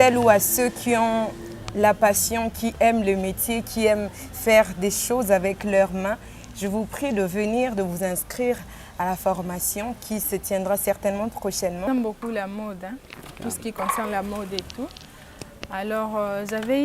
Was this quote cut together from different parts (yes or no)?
yes